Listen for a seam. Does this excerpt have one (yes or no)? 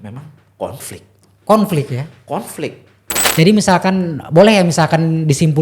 yes